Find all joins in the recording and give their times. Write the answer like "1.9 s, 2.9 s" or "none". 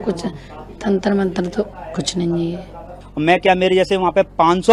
3.0 s